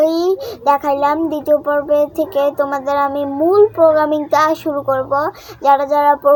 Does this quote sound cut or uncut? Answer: uncut